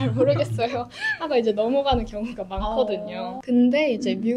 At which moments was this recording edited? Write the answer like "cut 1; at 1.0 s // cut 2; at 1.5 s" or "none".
cut 1; at 3.4 s